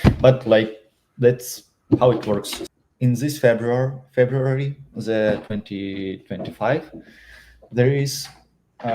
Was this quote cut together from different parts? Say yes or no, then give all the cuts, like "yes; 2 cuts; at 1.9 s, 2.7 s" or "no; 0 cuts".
yes; 1 cut; at 2.6 s